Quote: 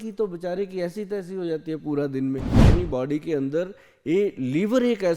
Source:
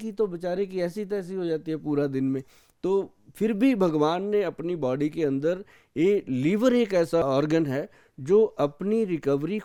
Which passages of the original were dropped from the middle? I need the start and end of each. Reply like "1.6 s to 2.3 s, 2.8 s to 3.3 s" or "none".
2.7 s to 4.6 s